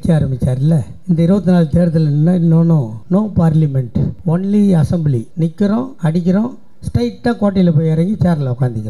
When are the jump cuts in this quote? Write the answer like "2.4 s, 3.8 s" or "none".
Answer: 0.9 s, 2.9 s, 4.1 s, 5.3 s, 5.9 s

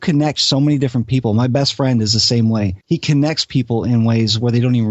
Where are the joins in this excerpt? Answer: 2.8 s

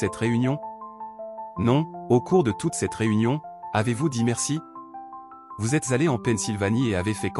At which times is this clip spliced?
none

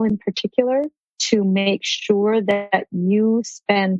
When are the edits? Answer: none

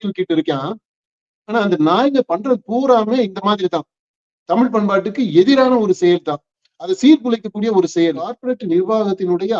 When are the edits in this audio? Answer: 8.4 s

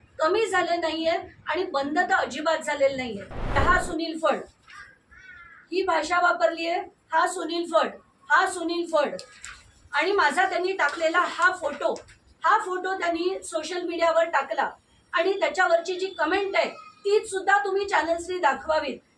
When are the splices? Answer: 3.5 s

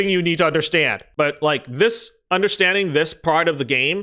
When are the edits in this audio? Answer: 1.0 s

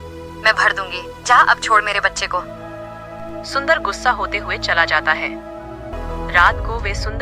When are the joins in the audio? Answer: 5.9 s

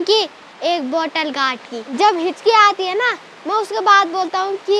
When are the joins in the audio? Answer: 1.9 s

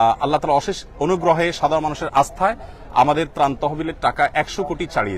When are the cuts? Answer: none

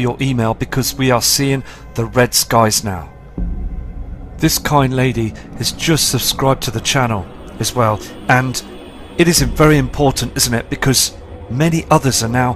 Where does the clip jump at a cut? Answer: none

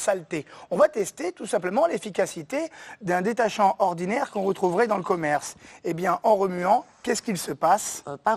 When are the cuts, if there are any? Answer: none

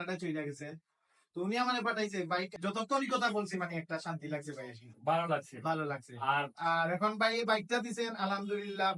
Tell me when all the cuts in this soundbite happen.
2.5 s

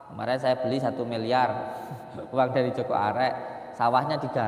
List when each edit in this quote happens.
none

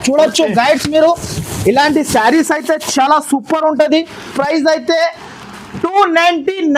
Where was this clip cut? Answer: 4.3 s

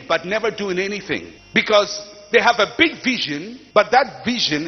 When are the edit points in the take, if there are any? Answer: none

